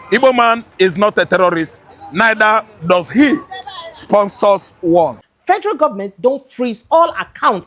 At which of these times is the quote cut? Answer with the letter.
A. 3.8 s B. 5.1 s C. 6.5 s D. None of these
B